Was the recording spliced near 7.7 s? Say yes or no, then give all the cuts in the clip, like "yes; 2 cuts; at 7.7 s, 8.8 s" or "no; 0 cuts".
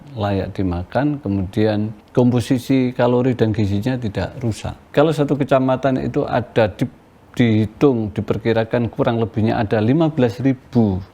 no; 2 cuts; at 2.0 s, 4.8 s